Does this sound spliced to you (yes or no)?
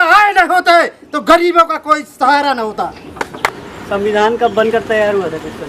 yes